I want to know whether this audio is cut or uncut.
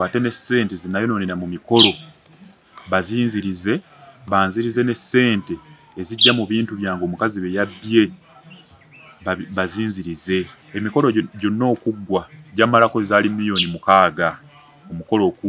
uncut